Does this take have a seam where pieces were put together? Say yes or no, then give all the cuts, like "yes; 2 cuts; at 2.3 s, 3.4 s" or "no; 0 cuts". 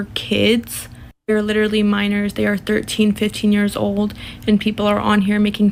no; 0 cuts